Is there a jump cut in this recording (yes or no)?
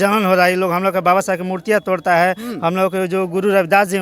no